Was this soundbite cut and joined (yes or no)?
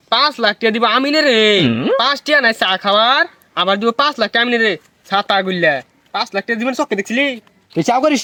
no